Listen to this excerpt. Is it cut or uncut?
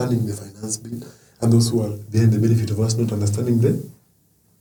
uncut